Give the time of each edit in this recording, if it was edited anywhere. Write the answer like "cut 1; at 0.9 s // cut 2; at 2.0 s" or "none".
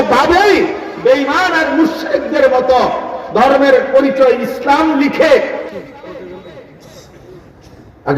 cut 1; at 5.7 s